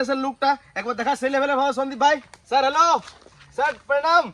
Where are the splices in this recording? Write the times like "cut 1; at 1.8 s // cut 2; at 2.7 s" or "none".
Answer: cut 1; at 2.3 s